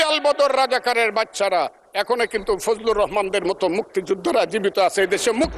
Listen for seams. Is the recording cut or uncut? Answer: uncut